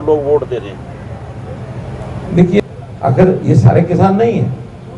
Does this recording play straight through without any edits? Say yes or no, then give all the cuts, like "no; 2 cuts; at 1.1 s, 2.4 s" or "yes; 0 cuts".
no; 1 cut; at 2.6 s